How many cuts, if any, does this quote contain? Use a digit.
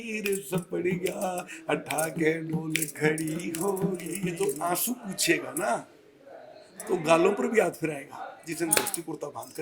2